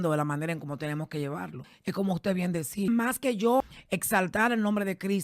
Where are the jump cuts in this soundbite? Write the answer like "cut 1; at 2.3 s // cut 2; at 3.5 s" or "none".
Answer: cut 1; at 1.6 s // cut 2; at 2.9 s // cut 3; at 3.8 s